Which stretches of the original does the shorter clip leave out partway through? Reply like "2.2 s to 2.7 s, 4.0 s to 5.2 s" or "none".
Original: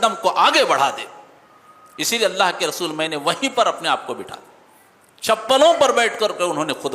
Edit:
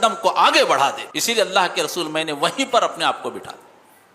1.1 s to 1.9 s